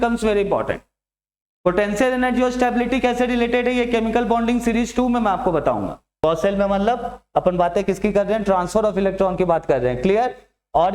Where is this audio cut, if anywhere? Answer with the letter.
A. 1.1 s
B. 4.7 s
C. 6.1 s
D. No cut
C